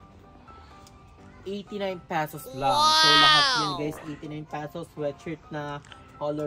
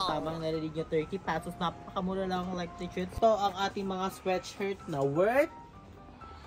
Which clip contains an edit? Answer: second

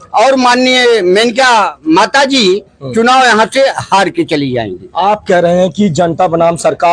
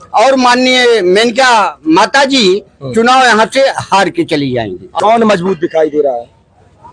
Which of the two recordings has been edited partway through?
second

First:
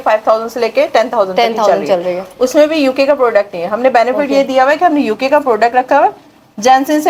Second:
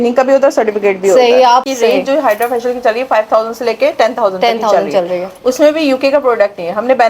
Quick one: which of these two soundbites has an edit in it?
second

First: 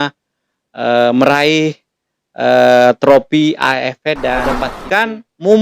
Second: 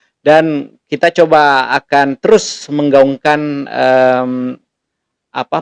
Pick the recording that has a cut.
first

